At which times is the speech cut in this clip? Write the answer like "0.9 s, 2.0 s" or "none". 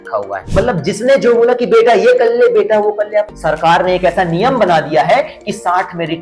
3.3 s